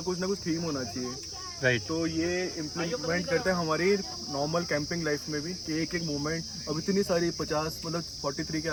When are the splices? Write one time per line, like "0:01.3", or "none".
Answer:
none

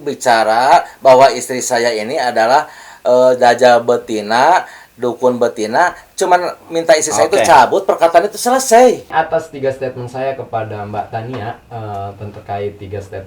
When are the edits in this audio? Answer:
0:09.1

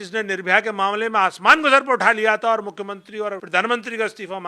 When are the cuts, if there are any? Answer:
0:03.4

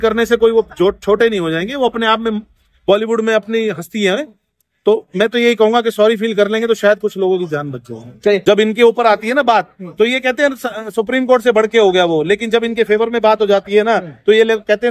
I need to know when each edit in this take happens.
0:08.4

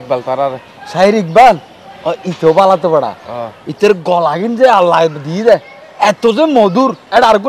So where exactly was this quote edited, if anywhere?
none

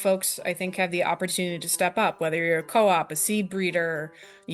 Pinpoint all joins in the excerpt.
none

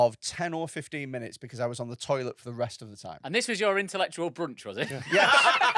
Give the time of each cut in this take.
0:03.2

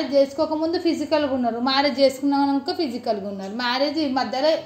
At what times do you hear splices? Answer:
none

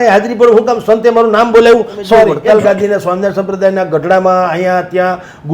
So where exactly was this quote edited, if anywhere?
0:02.4

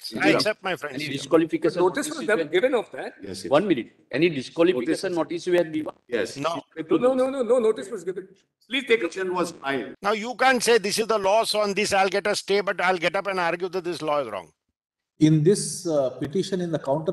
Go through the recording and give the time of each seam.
0:09.9

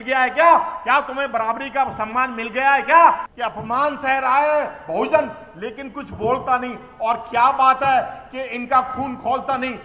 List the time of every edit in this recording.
0:03.3

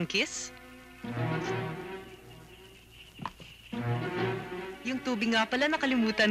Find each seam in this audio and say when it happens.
0:04.8

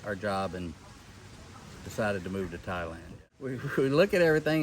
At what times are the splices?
0:03.5

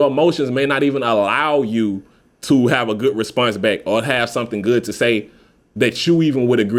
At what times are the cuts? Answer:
none

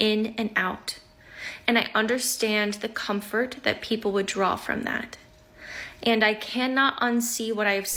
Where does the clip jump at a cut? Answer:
none

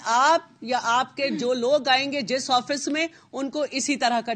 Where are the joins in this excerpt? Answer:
none

